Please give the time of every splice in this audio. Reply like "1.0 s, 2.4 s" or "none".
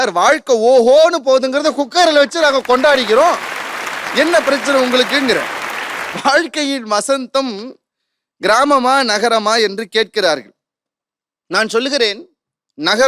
none